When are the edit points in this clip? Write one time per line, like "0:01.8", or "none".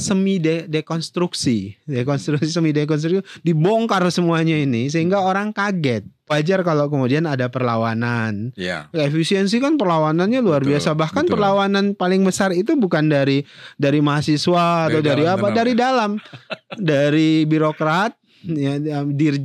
0:06.3